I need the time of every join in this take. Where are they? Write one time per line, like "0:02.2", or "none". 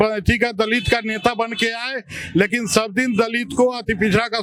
none